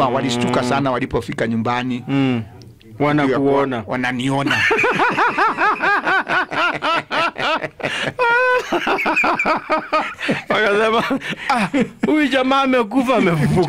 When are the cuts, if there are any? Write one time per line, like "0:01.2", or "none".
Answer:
none

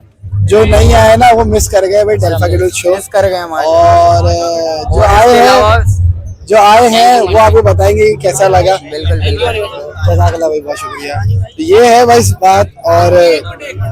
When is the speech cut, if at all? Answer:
none

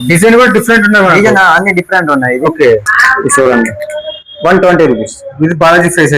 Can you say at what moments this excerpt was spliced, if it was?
0:03.0

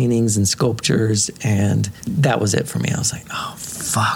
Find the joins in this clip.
none

